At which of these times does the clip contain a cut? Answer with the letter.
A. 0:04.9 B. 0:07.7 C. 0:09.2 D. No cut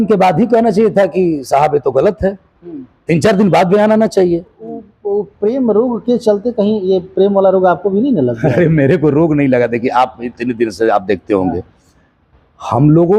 A